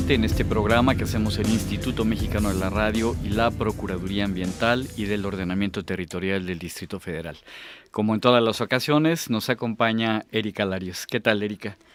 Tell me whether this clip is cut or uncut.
uncut